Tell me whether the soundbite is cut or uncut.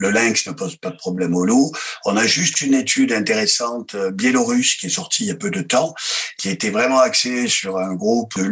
uncut